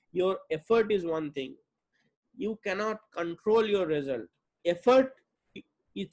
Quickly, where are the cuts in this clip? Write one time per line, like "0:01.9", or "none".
0:04.6